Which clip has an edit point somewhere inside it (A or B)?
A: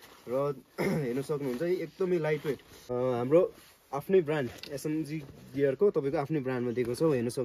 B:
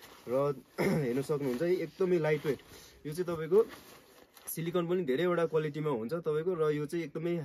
A